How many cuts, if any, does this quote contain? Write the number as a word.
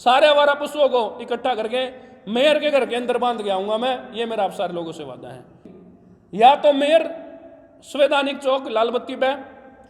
one